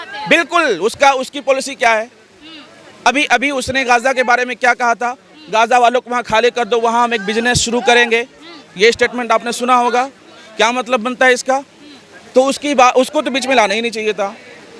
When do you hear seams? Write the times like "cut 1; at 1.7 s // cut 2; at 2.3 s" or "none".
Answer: none